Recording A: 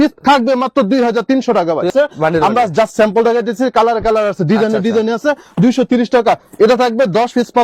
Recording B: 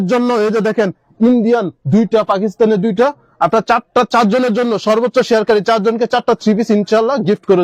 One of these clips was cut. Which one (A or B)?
A